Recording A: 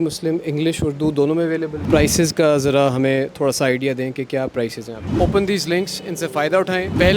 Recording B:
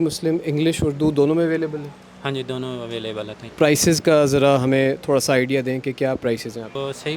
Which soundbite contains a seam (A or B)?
A